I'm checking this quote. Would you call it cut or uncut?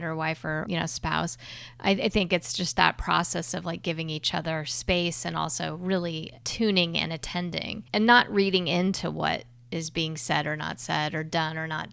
cut